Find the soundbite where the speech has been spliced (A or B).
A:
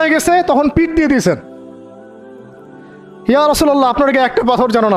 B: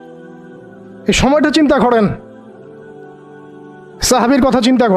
B